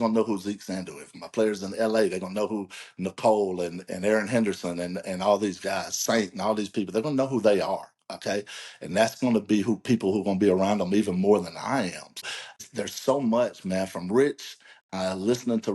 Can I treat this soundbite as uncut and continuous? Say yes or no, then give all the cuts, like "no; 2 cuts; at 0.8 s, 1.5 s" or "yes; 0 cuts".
no; 1 cut; at 12.1 s